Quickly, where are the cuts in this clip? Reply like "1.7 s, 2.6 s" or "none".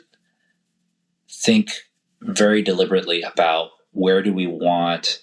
none